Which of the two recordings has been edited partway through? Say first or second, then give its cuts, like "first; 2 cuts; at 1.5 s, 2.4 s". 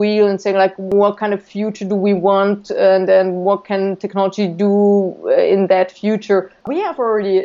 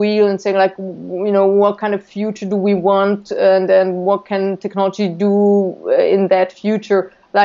first; 2 cuts; at 0.9 s, 6.7 s